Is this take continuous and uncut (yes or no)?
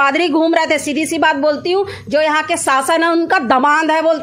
yes